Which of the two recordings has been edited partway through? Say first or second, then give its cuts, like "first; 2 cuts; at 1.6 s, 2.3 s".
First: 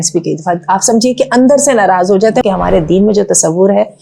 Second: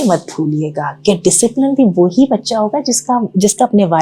first; 1 cut; at 2.4 s